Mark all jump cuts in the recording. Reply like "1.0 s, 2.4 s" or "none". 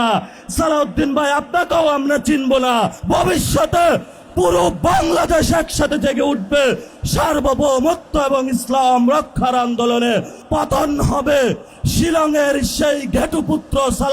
3.0 s, 10.4 s, 11.7 s